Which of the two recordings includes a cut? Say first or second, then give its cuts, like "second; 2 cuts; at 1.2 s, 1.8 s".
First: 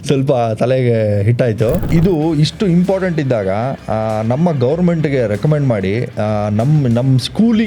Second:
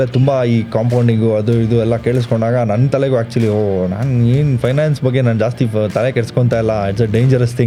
first; 1 cut; at 1.8 s